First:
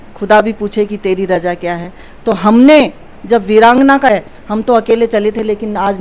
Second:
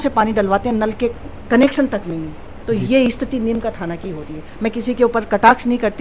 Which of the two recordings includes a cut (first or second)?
first